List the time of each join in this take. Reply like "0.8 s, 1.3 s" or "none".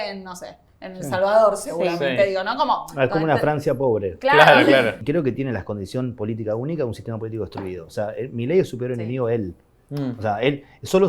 5.0 s